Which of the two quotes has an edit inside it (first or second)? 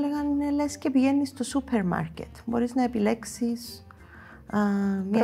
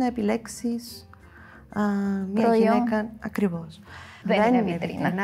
second